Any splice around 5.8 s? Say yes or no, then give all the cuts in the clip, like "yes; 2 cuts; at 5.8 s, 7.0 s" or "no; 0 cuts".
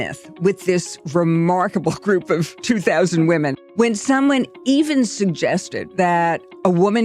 yes; 2 cuts; at 3.6 s, 5.8 s